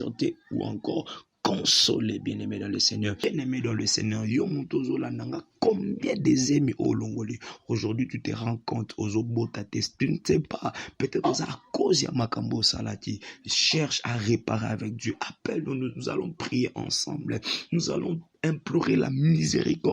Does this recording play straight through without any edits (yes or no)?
no